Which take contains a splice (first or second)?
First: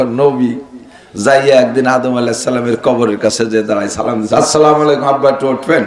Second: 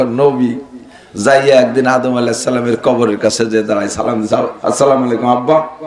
first